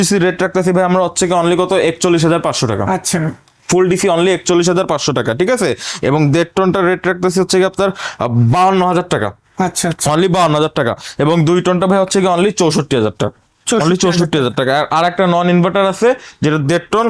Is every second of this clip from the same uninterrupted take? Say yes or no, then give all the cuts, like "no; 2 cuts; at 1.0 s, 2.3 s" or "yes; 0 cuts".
yes; 0 cuts